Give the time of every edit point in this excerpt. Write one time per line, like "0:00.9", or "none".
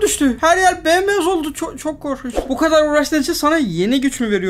0:02.4